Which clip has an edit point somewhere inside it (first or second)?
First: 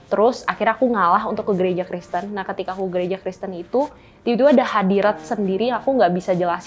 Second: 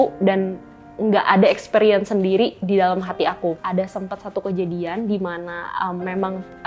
second